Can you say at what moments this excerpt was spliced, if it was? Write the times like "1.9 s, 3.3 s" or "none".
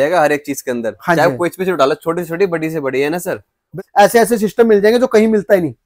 3.7 s